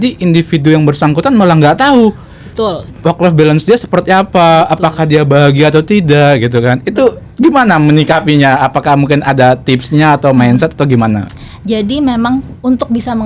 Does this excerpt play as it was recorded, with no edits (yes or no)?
yes